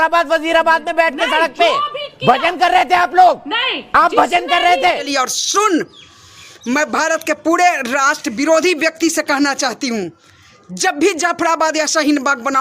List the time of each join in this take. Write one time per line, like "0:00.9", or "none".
0:05.0